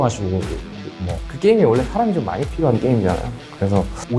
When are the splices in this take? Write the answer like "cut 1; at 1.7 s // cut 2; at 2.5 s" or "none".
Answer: cut 1; at 1.3 s